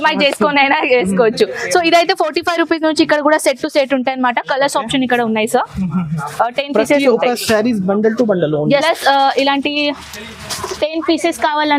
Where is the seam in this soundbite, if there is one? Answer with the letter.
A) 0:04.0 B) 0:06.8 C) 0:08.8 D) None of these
C